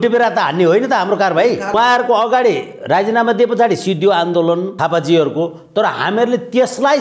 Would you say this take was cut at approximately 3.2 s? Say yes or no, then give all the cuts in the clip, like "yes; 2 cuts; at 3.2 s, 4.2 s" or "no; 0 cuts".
no; 2 cuts; at 1.8 s, 4.7 s